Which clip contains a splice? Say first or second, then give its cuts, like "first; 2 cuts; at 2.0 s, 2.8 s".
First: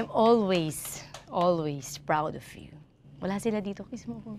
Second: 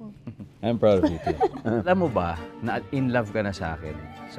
second; 1 cut; at 1.9 s